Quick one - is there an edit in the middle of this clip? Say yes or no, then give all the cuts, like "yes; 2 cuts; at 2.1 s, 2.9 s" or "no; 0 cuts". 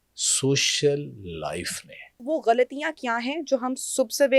yes; 1 cut; at 2.2 s